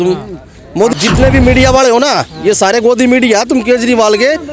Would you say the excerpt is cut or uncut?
cut